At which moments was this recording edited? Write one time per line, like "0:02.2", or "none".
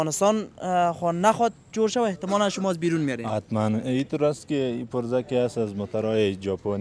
none